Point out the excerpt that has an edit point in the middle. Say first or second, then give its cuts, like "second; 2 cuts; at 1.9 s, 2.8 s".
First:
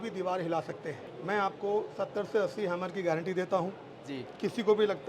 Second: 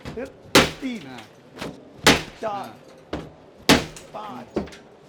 first; 1 cut; at 1.0 s